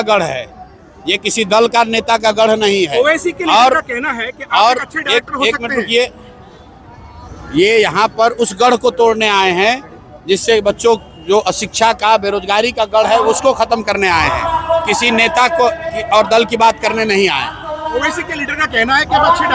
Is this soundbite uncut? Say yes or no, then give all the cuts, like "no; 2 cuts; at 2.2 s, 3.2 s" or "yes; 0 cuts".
yes; 0 cuts